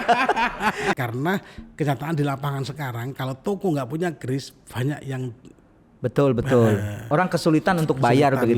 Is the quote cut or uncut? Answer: cut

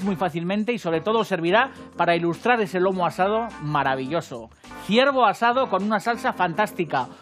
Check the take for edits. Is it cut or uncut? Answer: uncut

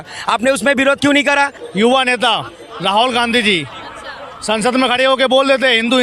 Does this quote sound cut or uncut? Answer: cut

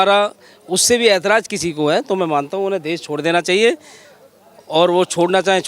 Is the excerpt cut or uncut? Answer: uncut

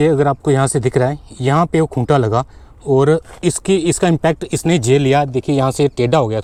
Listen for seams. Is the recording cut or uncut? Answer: uncut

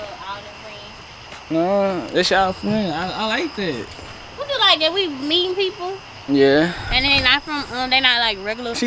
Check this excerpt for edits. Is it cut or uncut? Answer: uncut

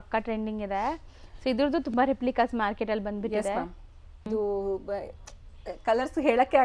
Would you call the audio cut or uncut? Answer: cut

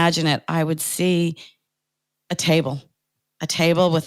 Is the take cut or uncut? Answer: uncut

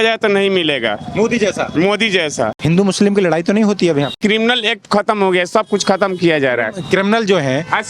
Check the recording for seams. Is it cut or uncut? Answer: cut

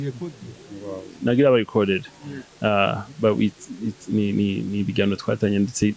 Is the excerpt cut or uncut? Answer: uncut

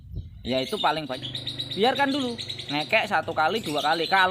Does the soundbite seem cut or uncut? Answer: cut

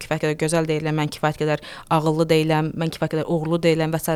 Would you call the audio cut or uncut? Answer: uncut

